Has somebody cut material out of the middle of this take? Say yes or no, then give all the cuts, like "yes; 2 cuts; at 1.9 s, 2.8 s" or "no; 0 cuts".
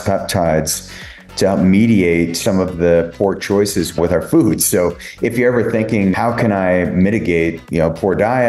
yes; 4 cuts; at 2.4 s, 4.0 s, 6.1 s, 7.6 s